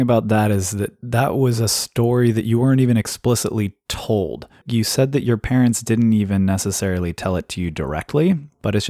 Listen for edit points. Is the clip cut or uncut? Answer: uncut